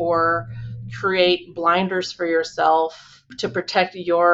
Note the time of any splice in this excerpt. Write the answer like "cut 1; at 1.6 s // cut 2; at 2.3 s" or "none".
cut 1; at 3.3 s